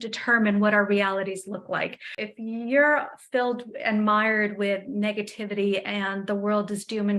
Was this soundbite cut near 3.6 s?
no; 1 cut; at 2.3 s

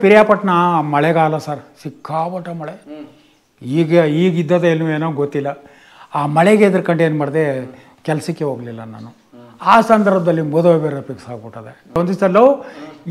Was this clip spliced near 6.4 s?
no; 1 cut; at 12.0 s

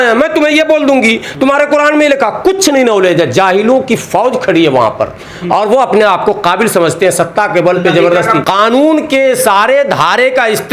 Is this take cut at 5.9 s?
no; 1 cut; at 8.4 s

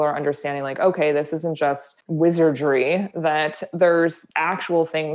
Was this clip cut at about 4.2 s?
yes; 2 cuts; at 2.0 s, 4.2 s

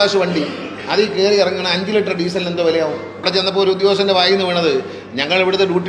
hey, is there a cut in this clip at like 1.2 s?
no; 1 cut; at 3.2 s

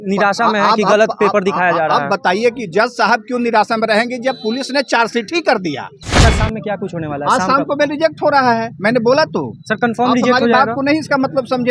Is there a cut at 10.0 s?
no; 1 cut; at 6.2 s

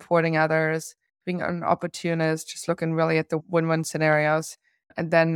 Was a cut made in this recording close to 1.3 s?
no; 1 cut; at 3.4 s

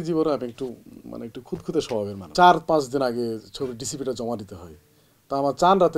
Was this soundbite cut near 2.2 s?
yes; 1 cut; at 2.2 s

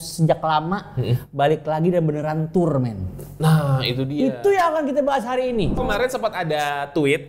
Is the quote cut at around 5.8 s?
yes; 1 cut; at 5.8 s

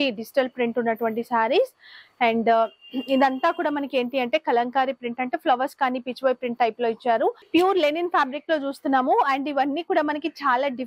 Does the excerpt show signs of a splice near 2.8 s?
no; 1 cut; at 7.5 s

